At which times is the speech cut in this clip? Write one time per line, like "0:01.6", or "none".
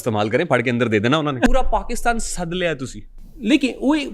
0:01.5